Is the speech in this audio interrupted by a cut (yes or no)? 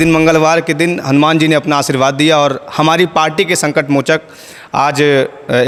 no